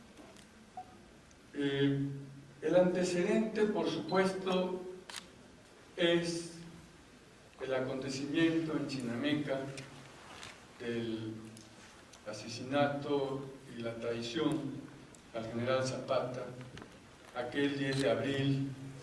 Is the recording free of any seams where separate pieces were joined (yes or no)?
no